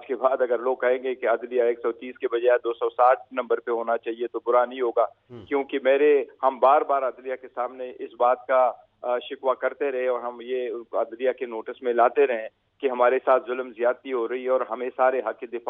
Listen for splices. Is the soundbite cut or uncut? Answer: uncut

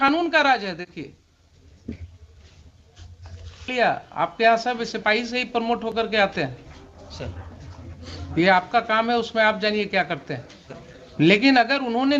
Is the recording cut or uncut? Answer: cut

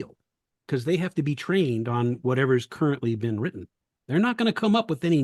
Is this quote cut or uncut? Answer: uncut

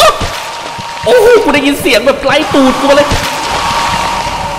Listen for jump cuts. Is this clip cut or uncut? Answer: cut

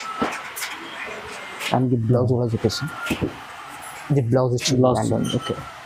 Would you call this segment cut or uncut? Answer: uncut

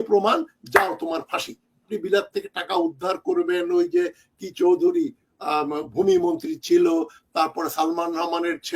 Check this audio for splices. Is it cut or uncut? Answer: cut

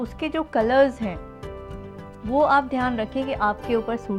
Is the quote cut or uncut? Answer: uncut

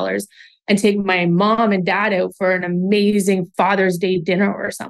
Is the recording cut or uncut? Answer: cut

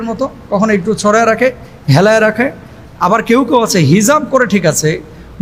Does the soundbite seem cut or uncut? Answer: uncut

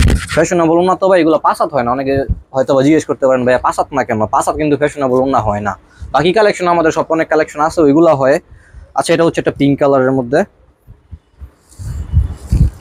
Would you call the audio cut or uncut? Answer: uncut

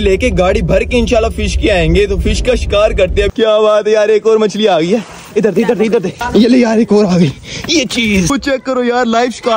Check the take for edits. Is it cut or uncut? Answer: cut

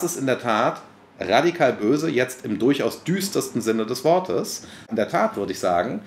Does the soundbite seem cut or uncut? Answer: cut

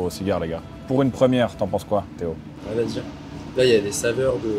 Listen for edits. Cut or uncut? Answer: uncut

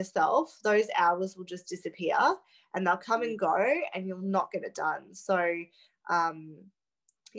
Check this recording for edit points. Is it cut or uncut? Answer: uncut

